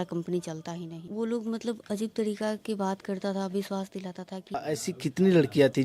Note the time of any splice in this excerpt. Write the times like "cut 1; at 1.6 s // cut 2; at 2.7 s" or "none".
cut 1; at 0.9 s // cut 2; at 4.6 s

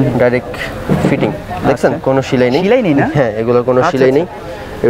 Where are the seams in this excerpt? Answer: none

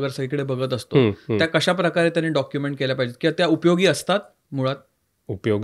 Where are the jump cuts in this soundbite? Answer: none

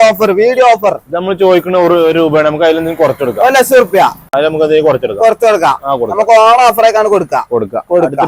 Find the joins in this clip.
none

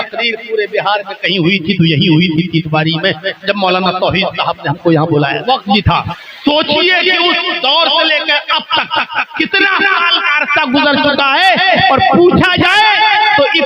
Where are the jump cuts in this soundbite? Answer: cut 1; at 5.5 s // cut 2; at 6.1 s

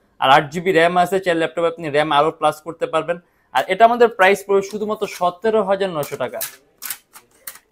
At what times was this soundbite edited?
none

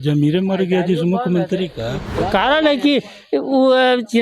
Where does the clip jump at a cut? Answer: cut 1; at 2.1 s

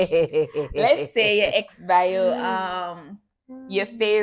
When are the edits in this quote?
none

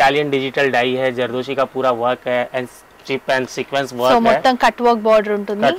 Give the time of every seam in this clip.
none

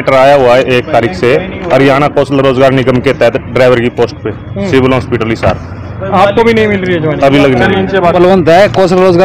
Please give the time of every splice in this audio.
cut 1; at 8.1 s

